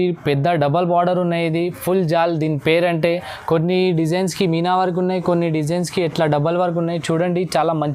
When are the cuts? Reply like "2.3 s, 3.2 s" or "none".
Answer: none